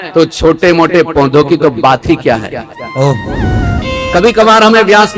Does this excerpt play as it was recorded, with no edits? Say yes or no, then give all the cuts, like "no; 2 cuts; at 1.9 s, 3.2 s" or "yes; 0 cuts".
no; 1 cut; at 3.8 s